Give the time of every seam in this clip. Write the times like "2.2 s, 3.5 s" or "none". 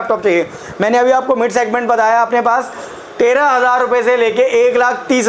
none